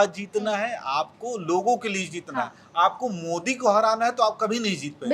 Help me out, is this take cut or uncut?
uncut